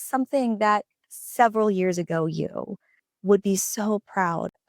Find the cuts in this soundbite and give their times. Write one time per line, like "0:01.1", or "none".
0:01.0